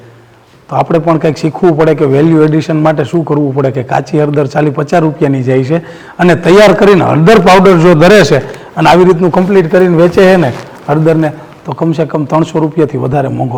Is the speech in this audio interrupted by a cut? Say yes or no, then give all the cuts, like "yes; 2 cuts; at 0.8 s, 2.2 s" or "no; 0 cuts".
no; 0 cuts